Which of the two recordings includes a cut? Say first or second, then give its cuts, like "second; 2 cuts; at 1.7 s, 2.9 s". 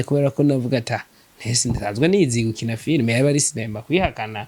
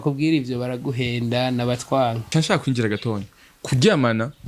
second; 1 cut; at 2.2 s